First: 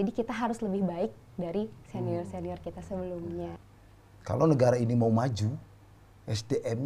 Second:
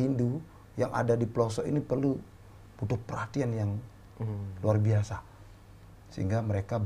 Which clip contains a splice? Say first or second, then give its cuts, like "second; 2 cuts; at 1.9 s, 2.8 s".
first; 1 cut; at 3.6 s